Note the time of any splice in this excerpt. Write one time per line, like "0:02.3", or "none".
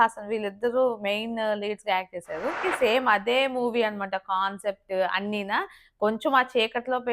0:02.7